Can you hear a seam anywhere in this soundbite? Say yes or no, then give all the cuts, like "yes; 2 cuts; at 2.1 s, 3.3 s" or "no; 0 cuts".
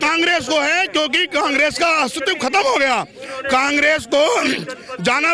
no; 0 cuts